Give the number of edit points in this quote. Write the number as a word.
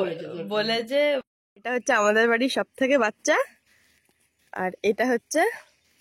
one